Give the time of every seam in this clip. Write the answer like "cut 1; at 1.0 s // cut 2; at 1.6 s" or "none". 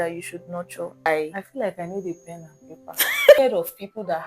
cut 1; at 1.1 s // cut 2; at 3.4 s